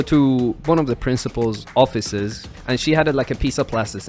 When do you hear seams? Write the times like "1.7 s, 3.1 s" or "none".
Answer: 1.6 s, 2.5 s